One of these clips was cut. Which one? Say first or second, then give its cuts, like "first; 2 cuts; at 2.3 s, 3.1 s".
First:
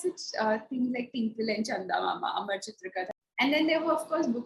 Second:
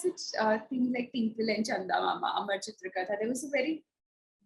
first; 1 cut; at 3.1 s